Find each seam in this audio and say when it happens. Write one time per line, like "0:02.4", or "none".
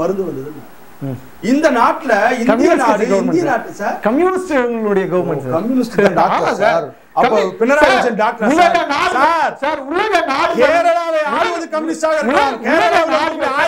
none